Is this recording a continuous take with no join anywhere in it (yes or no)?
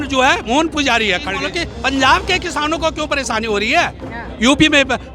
no